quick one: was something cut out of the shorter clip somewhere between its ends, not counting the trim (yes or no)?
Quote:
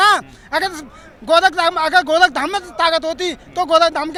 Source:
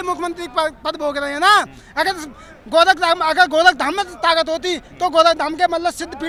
no